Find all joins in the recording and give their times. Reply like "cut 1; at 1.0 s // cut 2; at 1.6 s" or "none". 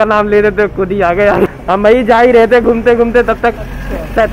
cut 1; at 1.5 s

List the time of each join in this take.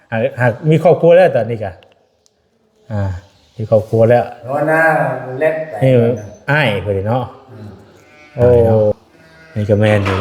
cut 1; at 8.9 s

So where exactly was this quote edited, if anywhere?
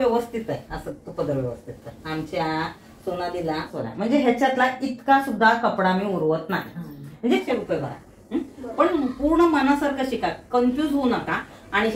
cut 1; at 3.7 s // cut 2; at 7.4 s

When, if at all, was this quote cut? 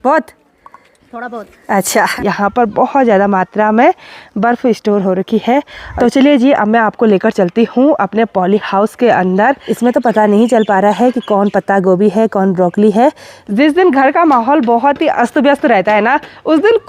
cut 1; at 2.1 s // cut 2; at 5.8 s // cut 3; at 9.7 s // cut 4; at 13.3 s

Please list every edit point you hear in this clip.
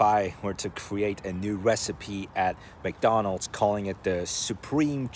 none

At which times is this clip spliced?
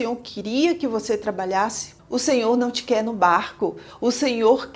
cut 1; at 1.9 s

